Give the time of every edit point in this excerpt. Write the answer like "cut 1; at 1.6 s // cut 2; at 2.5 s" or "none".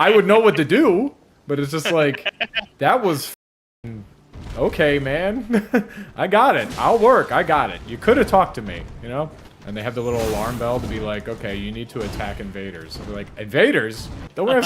none